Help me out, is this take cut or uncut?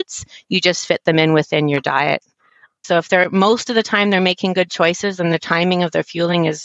cut